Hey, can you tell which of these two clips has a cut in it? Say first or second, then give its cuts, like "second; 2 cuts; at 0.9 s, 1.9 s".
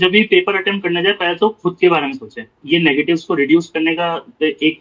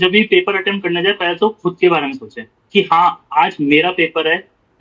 first; 1 cut; at 2.6 s